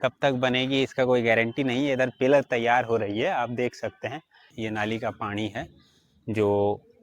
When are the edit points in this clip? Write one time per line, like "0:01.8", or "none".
0:04.5